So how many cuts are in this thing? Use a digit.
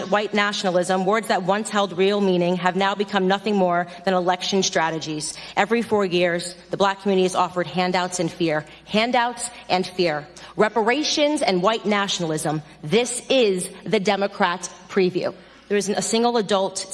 1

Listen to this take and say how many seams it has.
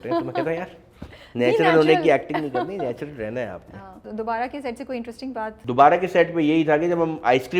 2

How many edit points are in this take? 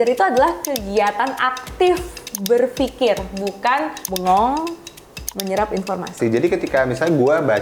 2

